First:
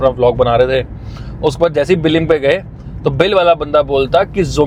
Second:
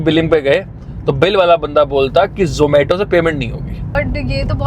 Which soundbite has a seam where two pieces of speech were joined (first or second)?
second